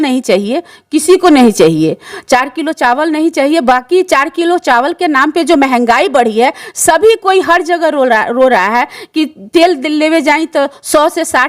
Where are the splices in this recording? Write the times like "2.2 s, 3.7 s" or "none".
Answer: none

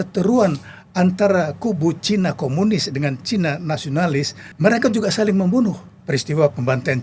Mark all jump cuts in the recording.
4.4 s, 5.9 s

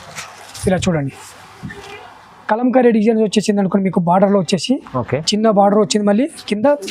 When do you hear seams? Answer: none

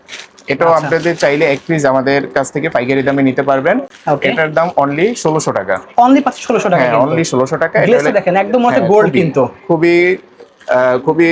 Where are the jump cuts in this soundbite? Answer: none

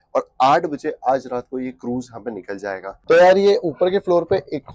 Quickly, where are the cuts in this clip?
2.9 s

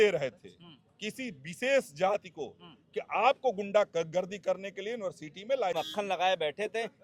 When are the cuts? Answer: 5.7 s

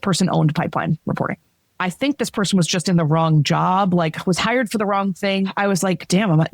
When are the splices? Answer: 1.7 s, 5.5 s

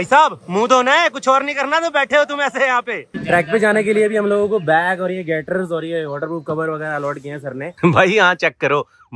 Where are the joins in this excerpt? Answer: 3.0 s, 7.7 s

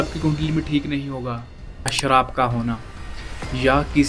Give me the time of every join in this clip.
1.9 s

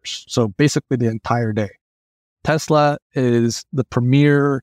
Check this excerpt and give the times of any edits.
2.3 s

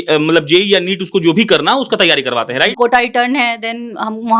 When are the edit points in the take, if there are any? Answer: 2.7 s

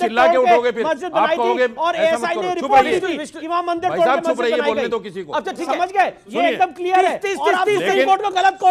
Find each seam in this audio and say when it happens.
none

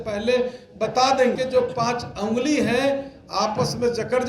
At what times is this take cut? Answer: 1.3 s

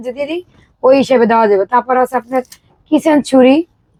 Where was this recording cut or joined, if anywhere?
none

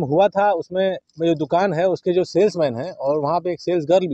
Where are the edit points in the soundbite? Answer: 1.1 s

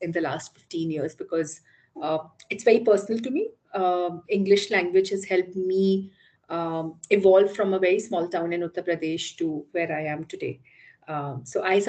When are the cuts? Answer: none

